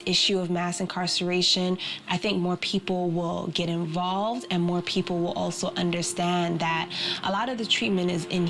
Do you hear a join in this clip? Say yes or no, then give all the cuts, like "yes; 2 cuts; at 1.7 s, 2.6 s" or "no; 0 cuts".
no; 0 cuts